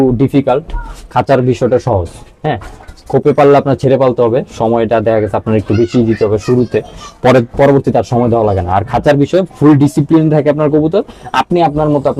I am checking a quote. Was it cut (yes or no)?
no